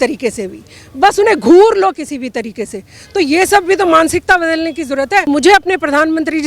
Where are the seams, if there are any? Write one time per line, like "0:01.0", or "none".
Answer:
0:05.3